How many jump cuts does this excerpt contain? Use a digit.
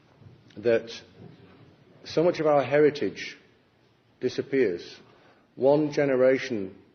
1